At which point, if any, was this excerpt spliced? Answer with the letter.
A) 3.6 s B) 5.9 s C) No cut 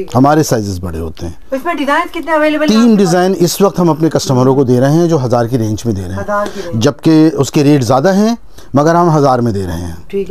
C